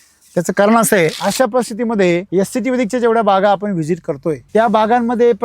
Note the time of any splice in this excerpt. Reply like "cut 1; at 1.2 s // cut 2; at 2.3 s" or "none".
cut 1; at 1.2 s // cut 2; at 2.3 s // cut 3; at 4.4 s